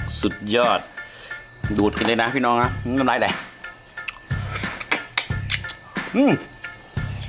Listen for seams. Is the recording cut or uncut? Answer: uncut